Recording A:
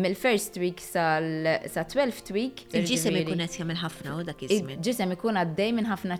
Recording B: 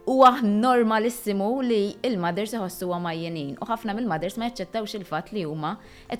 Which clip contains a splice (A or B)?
A